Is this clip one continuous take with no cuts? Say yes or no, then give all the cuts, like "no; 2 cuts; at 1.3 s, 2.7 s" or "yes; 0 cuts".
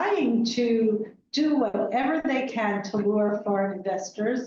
yes; 0 cuts